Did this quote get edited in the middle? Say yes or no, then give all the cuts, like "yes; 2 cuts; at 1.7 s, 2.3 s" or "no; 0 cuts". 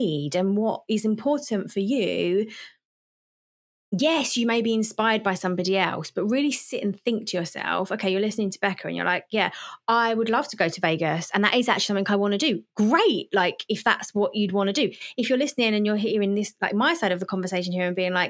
no; 0 cuts